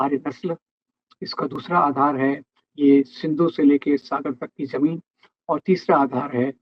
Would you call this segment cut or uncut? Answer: uncut